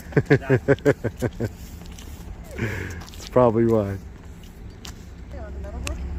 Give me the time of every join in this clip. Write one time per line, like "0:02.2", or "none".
none